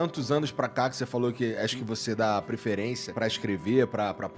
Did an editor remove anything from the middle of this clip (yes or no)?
yes